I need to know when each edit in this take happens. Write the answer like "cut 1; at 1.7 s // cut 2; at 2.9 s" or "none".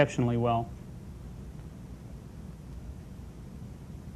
cut 1; at 2.2 s